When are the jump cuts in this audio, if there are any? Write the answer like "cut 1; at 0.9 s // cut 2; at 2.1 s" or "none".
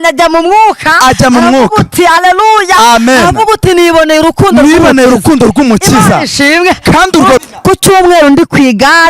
cut 1; at 7.4 s